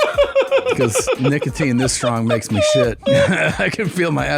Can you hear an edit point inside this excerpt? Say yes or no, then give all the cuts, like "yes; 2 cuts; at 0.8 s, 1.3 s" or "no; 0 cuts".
yes; 1 cut; at 3.0 s